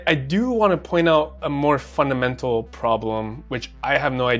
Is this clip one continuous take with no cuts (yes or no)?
yes